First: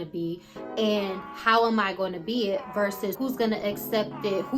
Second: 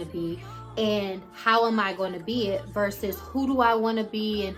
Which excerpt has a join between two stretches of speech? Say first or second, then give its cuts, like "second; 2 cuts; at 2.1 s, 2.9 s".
first; 1 cut; at 3.2 s